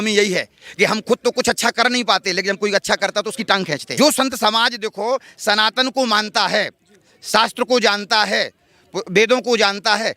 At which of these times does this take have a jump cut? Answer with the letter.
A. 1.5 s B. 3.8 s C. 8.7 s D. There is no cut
B